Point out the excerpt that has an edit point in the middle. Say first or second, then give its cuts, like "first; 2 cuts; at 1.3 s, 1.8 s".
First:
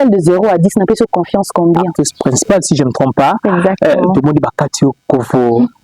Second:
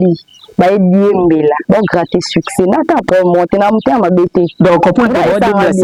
first; 1 cut; at 1.9 s